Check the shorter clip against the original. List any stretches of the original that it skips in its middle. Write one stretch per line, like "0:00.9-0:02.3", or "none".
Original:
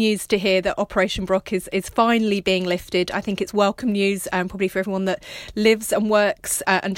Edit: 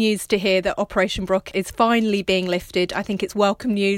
0:01.5-0:01.6